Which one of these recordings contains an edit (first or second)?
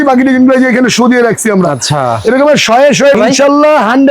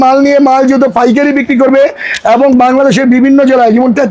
first